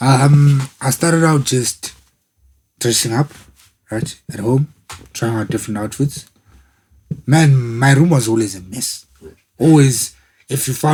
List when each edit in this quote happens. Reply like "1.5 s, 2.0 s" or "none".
none